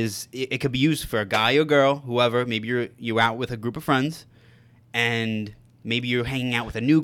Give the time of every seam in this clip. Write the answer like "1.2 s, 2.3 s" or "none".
none